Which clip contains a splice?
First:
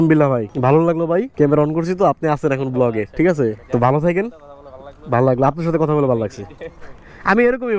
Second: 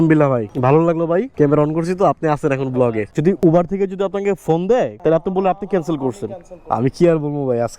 second; 2 cuts; at 3.1 s, 6.6 s

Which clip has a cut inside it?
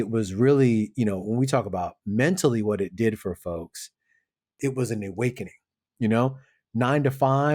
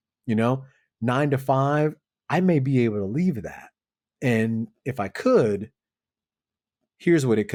first; 1 cut; at 4.6 s

